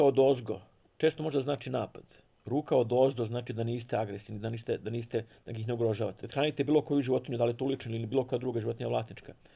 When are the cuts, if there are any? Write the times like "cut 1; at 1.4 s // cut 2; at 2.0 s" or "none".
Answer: cut 1; at 6.2 s